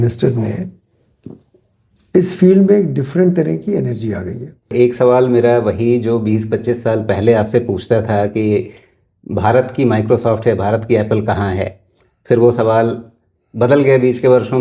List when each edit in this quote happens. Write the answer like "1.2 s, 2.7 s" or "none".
4.7 s